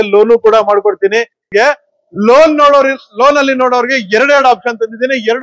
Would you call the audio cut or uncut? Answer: cut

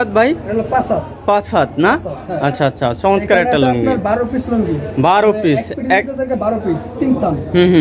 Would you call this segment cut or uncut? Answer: uncut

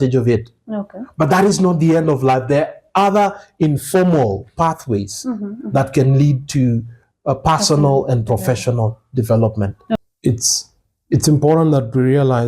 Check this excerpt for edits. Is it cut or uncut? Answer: cut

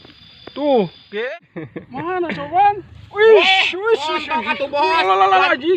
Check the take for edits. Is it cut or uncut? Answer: cut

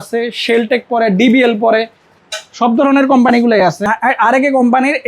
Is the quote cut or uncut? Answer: cut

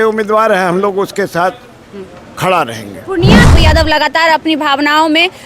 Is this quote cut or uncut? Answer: cut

